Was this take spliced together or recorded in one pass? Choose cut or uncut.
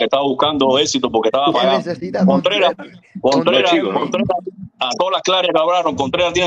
uncut